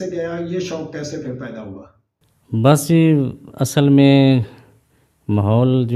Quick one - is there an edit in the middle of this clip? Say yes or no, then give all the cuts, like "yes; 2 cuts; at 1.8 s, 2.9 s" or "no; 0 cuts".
no; 0 cuts